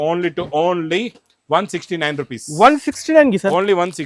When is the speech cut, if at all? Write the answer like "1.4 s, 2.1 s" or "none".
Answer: none